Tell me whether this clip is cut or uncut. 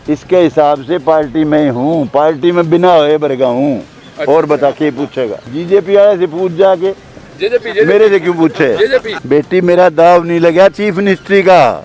cut